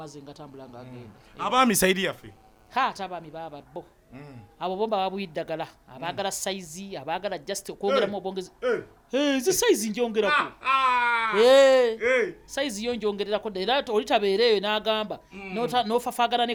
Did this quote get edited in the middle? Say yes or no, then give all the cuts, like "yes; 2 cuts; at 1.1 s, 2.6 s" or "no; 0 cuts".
no; 0 cuts